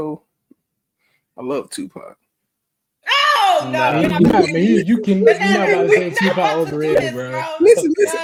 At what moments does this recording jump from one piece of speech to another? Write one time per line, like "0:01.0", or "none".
none